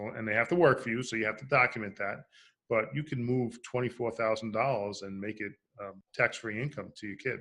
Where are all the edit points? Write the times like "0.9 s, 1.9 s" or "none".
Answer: 6.0 s